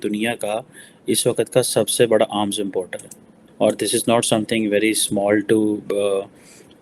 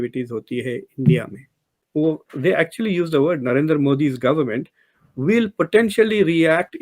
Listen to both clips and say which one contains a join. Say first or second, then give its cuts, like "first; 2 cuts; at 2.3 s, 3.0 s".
second; 1 cut; at 1.8 s